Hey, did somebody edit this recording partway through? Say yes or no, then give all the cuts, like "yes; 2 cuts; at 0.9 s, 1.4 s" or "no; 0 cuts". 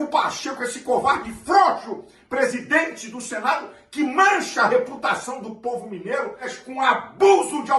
yes; 1 cut; at 6.5 s